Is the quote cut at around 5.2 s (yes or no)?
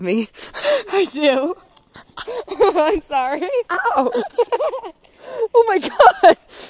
no